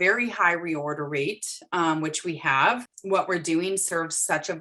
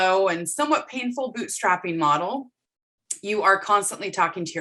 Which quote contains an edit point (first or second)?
first